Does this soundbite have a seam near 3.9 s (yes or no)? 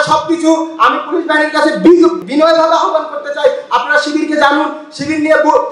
no